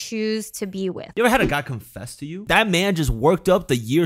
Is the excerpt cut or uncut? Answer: cut